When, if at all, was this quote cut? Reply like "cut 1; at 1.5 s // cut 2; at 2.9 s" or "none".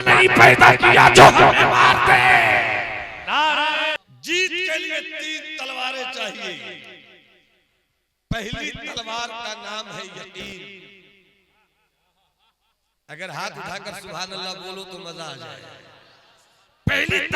cut 1; at 4.0 s